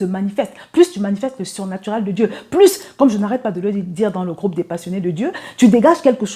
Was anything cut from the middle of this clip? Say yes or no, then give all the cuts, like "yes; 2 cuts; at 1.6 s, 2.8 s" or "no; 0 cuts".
no; 0 cuts